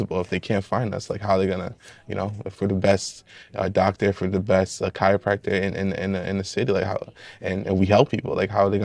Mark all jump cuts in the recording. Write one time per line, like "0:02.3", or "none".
none